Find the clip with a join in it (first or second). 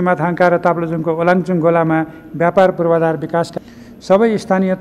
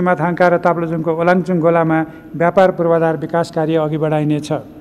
first